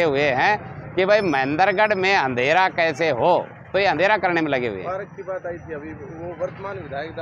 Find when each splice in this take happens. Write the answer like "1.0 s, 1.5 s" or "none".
none